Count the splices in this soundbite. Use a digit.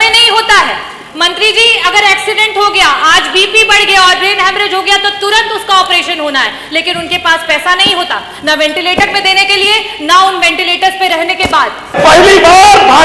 1